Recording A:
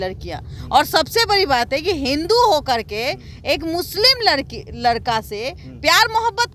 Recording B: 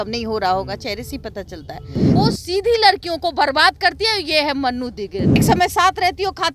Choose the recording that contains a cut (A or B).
B